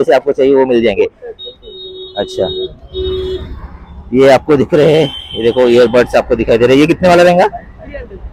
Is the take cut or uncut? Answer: uncut